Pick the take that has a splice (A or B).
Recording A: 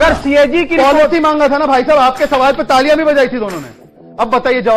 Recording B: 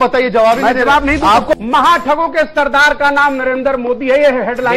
B